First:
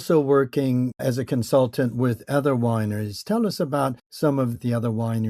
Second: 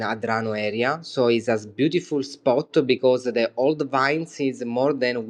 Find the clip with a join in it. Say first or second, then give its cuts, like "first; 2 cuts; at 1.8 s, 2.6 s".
first; 2 cuts; at 1.0 s, 4.3 s